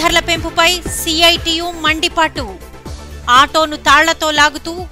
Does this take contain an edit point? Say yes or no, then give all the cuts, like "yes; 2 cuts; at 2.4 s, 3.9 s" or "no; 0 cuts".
no; 0 cuts